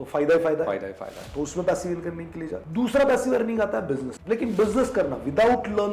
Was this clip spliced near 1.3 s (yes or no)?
no